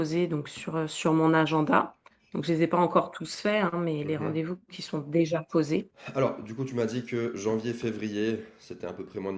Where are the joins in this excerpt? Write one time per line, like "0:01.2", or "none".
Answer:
0:06.0